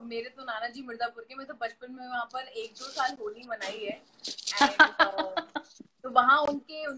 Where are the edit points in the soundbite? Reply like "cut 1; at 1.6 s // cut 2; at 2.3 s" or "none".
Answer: none